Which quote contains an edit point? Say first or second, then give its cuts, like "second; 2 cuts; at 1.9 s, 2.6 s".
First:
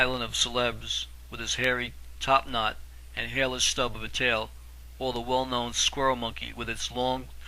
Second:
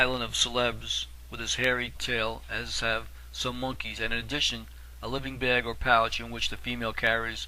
first; 1 cut; at 2.0 s